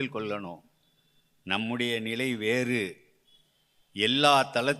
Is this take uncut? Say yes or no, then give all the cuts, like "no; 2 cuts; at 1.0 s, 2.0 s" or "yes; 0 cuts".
yes; 0 cuts